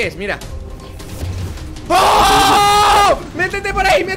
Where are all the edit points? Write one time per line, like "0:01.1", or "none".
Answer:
none